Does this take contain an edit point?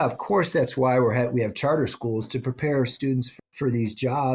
yes; 1 cut; at 3.3 s

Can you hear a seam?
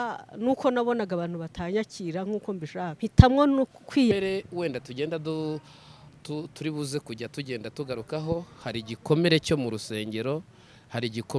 yes; 2 cuts; at 2.9 s, 4.1 s

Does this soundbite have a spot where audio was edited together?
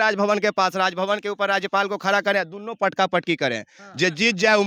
no; 0 cuts

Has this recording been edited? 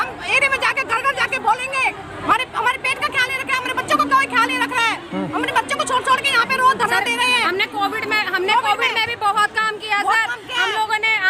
yes; 1 cut; at 2.2 s

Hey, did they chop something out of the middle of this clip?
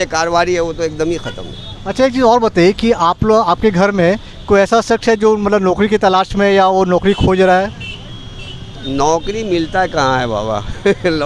no; 0 cuts

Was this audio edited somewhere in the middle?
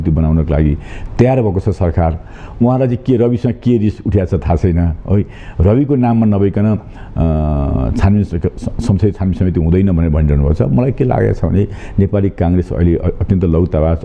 no; 0 cuts

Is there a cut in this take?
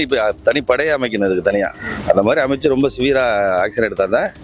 no; 0 cuts

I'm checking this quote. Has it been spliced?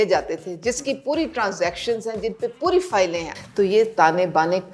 yes; 1 cut; at 3.2 s

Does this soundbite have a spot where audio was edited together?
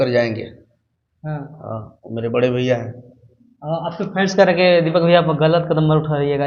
no; 0 cuts

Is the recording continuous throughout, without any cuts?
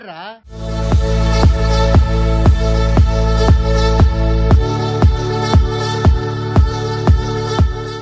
yes; 0 cuts

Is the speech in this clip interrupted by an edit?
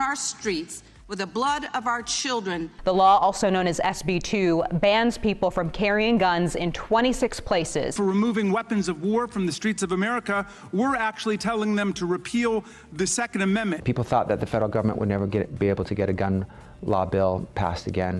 yes; 3 cuts; at 2.7 s, 7.9 s, 13.8 s

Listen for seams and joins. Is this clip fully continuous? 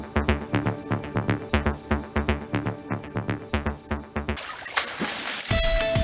yes; 0 cuts

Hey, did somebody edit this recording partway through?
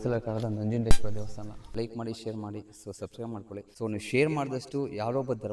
yes; 2 cuts; at 1.5 s, 3.7 s

